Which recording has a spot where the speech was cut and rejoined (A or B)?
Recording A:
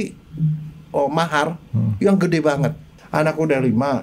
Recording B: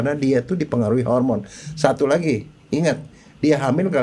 A